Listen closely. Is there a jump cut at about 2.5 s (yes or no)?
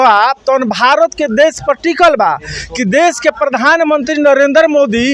no